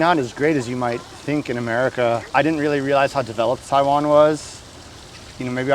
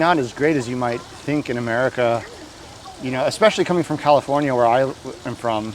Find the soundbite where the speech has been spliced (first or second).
first